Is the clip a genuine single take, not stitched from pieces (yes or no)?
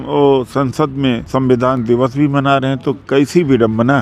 no